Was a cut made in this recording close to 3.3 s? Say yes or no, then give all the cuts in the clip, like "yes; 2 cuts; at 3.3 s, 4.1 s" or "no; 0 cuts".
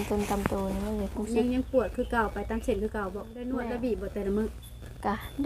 yes; 1 cut; at 3.3 s